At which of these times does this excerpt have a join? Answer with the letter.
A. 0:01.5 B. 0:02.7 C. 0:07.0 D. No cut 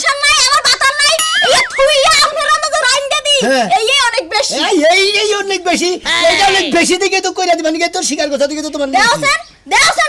D